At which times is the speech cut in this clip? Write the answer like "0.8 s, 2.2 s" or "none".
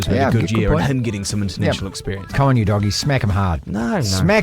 2.3 s

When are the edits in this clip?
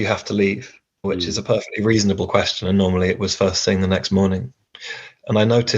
1.0 s

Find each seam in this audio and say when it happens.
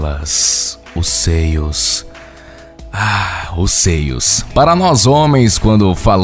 none

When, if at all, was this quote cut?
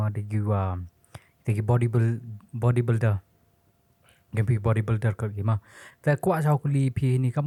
none

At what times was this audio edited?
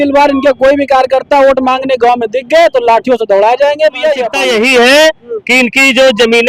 4.3 s

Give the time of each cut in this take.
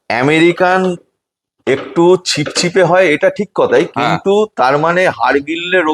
none

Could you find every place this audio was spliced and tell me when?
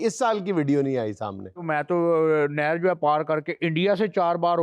1.7 s

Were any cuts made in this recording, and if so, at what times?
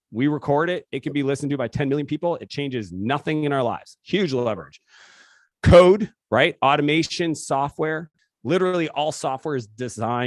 8.2 s

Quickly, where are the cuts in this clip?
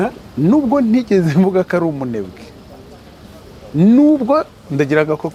none

